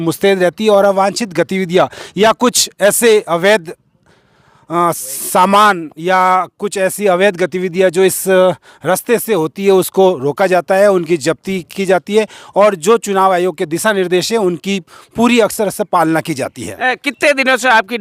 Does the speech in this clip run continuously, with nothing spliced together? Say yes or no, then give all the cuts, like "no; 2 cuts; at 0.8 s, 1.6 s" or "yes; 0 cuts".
yes; 0 cuts